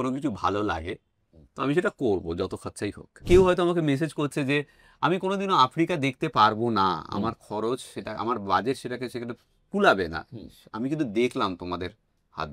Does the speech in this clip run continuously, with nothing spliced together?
no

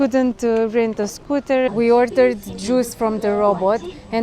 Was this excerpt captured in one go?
no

